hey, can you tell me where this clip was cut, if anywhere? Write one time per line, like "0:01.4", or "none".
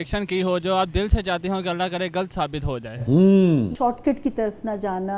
0:03.7